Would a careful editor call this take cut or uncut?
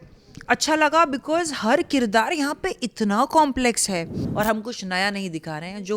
cut